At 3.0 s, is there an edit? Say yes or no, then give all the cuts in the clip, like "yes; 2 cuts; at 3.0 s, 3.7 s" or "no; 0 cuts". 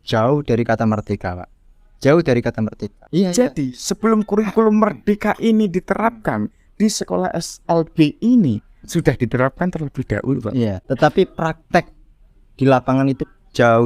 yes; 2 cuts; at 3.0 s, 10.8 s